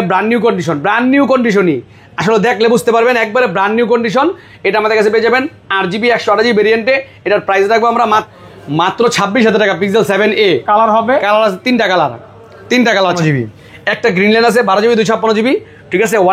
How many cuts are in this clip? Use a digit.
2